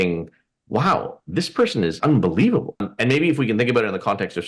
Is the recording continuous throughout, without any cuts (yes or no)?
no